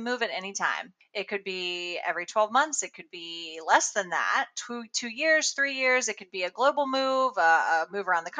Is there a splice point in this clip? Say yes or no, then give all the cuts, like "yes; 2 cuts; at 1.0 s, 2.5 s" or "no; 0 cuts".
no; 0 cuts